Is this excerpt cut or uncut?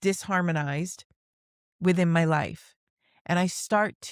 uncut